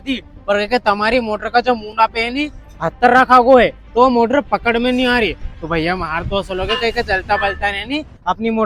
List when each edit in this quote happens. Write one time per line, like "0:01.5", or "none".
none